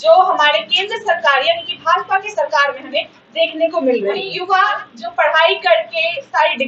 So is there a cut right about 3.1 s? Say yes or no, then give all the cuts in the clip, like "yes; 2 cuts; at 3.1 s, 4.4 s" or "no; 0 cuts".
no; 1 cut; at 4.3 s